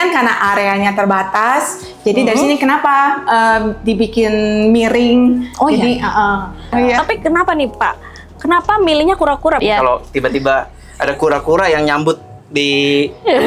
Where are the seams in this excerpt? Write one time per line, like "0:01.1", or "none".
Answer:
0:06.7
0:09.6